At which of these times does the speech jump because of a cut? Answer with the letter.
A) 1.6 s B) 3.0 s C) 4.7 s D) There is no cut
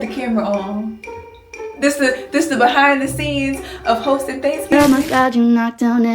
C